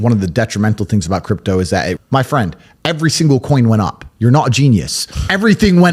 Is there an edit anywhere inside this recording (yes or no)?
yes